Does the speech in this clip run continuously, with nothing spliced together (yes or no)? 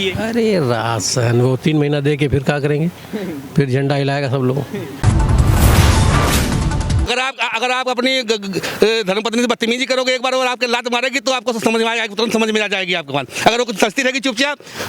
no